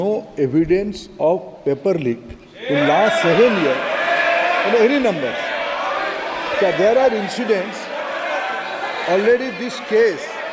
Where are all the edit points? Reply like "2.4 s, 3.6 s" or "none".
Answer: none